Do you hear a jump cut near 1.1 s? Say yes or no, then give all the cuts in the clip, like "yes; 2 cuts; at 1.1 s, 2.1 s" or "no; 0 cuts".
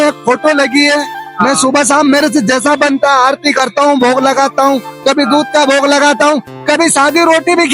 no; 0 cuts